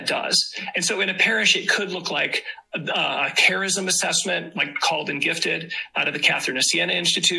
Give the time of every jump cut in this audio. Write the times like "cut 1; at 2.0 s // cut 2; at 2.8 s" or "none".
none